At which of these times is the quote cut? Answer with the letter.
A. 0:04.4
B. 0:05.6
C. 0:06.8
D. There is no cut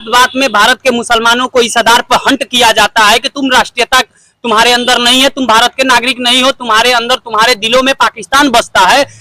D